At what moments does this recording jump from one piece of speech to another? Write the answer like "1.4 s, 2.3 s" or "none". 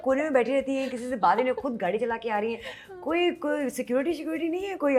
none